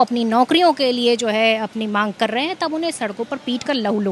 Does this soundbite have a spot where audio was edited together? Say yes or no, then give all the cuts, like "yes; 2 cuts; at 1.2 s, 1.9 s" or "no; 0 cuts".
no; 0 cuts